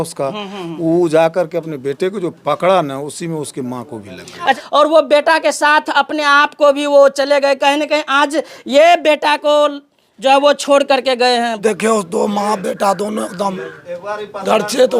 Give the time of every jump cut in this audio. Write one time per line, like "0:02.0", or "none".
0:04.6
0:11.6

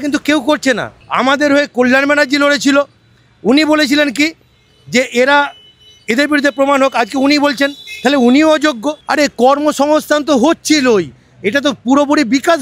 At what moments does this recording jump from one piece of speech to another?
0:01.0
0:09.0

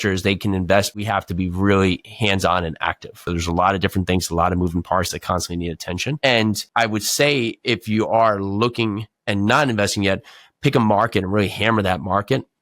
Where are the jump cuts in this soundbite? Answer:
0:01.0
0:03.2
0:06.6

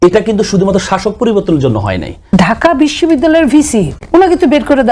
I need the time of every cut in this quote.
0:02.2

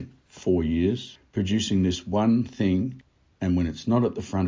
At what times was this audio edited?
0:01.1
0:03.0

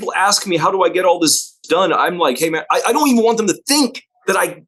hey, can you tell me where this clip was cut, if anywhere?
none

